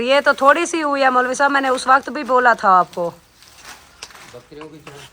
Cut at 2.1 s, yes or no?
no